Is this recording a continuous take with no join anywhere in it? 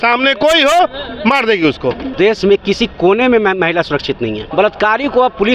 no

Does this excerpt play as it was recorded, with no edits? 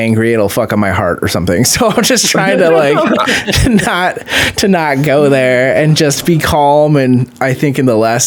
yes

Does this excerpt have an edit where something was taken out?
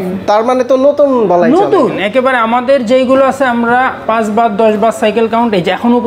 no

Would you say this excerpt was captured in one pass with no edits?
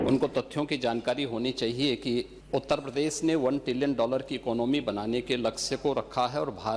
no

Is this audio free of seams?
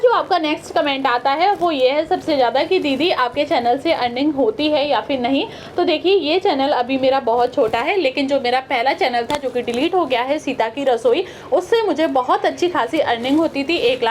yes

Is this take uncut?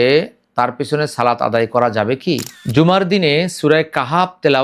no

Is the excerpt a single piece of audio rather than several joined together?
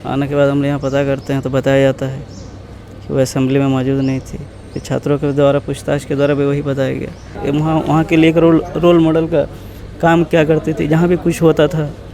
no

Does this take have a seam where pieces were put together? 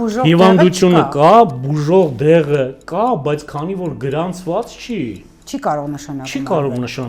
no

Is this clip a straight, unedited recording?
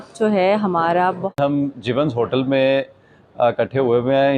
no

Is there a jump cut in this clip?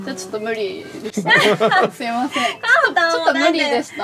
no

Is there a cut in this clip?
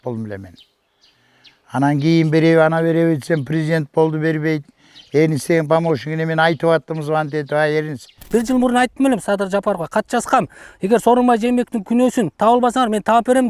yes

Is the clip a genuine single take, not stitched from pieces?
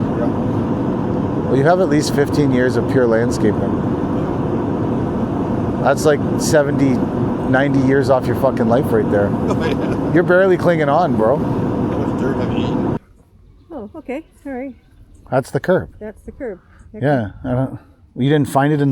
no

